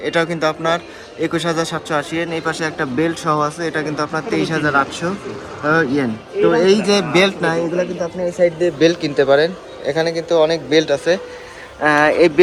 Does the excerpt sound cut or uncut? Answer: uncut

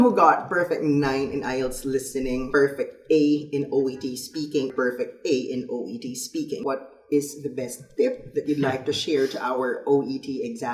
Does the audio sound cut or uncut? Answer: cut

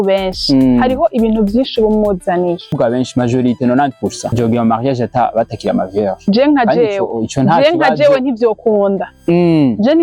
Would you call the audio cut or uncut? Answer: cut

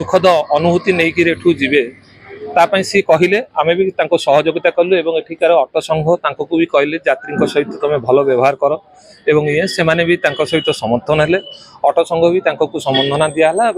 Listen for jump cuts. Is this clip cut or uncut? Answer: uncut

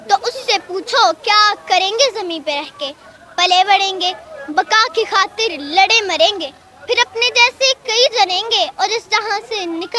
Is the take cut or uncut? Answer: uncut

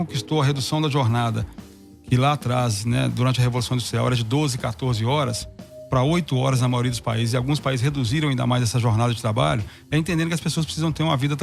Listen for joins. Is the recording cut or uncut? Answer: uncut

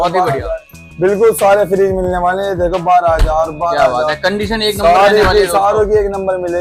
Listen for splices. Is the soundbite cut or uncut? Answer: uncut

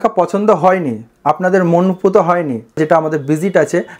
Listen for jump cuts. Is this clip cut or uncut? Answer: cut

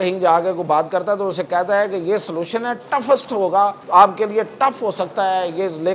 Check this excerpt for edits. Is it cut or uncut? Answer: cut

